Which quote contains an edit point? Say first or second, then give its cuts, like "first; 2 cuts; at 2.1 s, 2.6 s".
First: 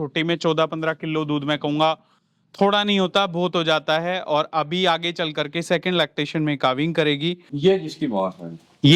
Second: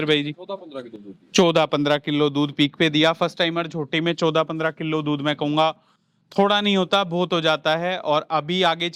first; 1 cut; at 7.5 s